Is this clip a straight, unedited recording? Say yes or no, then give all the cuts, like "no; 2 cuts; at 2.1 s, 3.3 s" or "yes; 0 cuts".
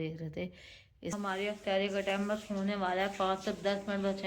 no; 1 cut; at 1.2 s